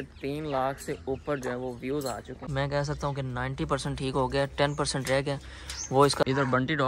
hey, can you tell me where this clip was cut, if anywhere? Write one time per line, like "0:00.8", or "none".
0:02.4
0:06.2